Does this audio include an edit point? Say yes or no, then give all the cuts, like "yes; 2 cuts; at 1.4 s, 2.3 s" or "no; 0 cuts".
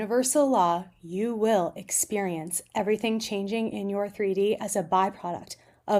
no; 0 cuts